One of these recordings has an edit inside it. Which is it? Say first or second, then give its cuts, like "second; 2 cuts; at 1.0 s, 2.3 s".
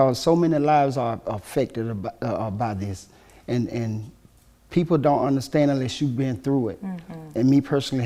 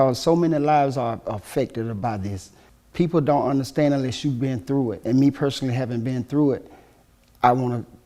second; 2 cuts; at 2.2 s, 5.0 s